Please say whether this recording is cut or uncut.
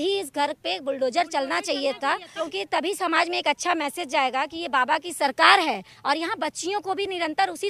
uncut